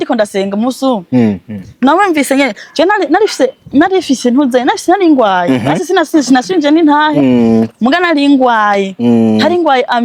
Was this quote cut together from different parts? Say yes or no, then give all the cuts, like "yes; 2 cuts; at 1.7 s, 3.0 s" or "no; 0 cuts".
no; 0 cuts